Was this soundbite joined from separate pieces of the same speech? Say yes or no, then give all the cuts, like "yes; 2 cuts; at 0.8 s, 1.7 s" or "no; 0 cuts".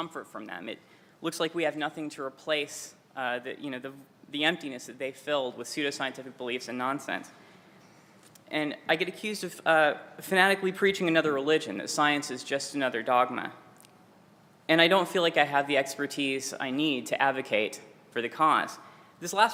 no; 0 cuts